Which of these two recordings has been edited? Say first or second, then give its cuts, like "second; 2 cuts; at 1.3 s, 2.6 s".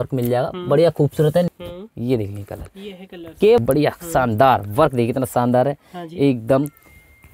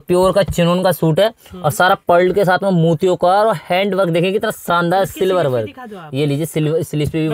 first; 2 cuts; at 1.5 s, 3.6 s